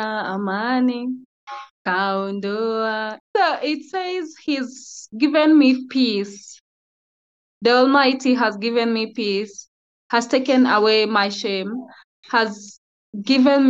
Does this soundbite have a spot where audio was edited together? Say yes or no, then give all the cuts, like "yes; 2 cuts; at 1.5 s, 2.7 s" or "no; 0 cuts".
yes; 1 cut; at 3.1 s